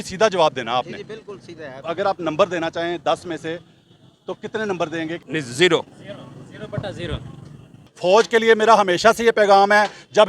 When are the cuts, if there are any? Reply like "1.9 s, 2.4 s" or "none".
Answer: 1.8 s, 5.2 s, 7.9 s